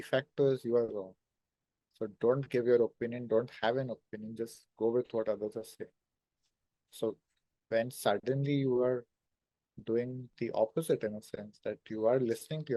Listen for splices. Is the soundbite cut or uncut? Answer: uncut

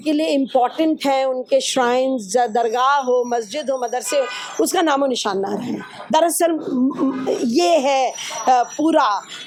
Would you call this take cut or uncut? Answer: uncut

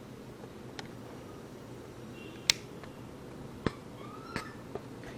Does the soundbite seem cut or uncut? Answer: cut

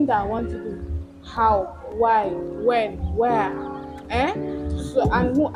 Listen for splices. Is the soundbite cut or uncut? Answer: uncut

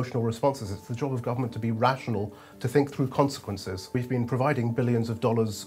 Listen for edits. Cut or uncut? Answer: cut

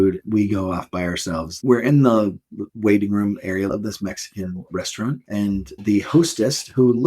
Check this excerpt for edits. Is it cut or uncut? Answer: cut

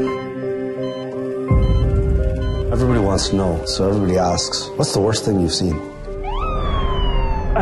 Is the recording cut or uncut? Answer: cut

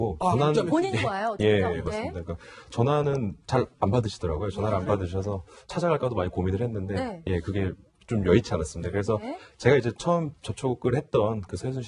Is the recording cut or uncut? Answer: uncut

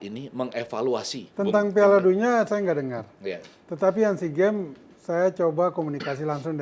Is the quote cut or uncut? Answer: cut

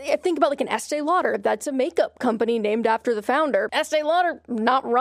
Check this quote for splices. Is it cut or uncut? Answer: cut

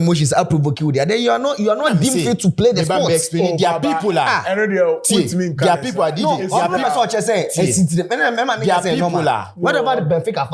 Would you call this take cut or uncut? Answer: uncut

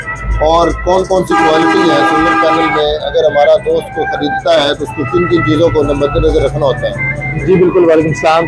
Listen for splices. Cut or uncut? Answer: uncut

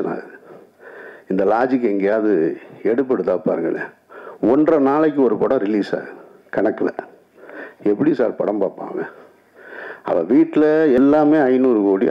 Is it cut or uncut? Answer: cut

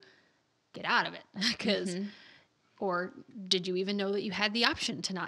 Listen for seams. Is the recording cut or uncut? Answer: uncut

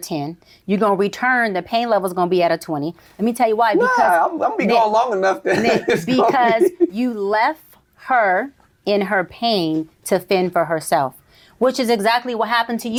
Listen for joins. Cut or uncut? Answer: uncut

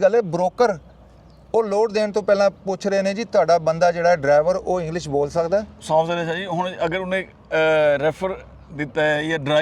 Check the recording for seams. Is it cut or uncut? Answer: uncut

